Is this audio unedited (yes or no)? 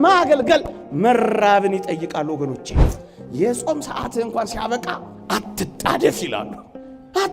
no